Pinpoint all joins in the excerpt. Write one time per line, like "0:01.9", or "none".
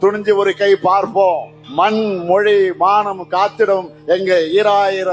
0:01.6